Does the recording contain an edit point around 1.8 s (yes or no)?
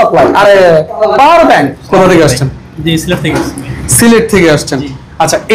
yes